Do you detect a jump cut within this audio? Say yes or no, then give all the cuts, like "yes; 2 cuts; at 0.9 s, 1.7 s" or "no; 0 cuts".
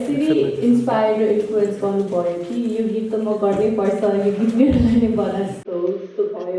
no; 0 cuts